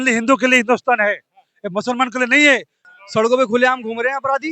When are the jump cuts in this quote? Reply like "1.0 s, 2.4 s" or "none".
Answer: 2.8 s